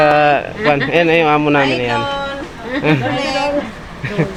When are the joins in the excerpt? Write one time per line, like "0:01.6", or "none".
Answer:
none